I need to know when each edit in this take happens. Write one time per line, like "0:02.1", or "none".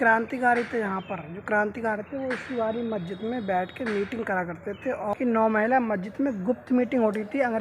0:05.1